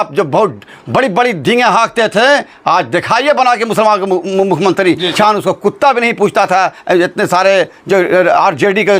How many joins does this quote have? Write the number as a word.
one